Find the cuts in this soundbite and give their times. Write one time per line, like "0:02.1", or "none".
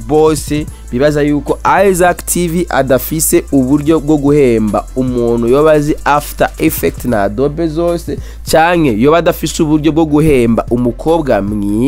none